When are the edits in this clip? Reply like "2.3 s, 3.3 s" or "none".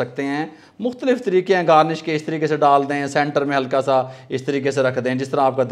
none